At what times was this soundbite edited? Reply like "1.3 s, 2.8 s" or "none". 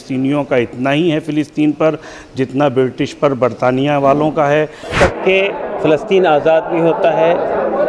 4.9 s